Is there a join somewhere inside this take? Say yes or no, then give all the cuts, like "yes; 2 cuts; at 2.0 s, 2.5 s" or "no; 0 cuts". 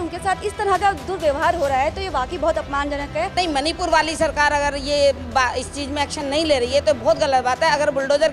yes; 1 cut; at 3.3 s